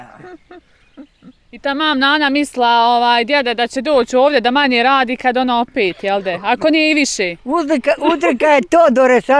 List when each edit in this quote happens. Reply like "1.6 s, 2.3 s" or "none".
1.4 s